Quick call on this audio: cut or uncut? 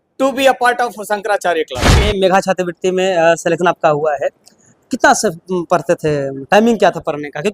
cut